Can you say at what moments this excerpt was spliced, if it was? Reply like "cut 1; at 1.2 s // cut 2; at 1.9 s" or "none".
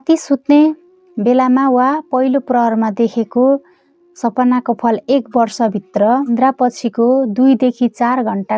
cut 1; at 6.3 s